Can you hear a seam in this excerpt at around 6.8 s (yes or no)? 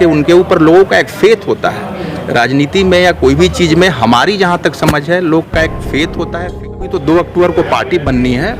yes